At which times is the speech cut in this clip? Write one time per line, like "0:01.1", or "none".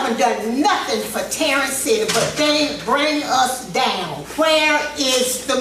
0:04.2